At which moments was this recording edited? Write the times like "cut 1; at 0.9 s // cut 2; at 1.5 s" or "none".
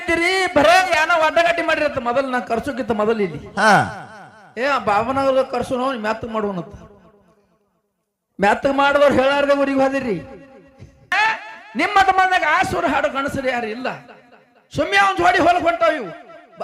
cut 1; at 11.1 s